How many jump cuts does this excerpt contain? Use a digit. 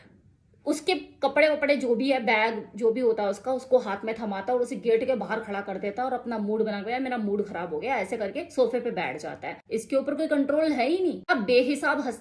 1